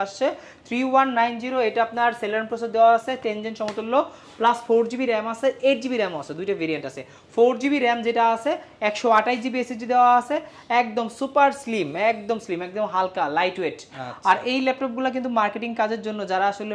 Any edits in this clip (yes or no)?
no